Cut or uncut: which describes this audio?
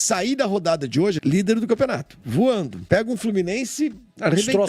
cut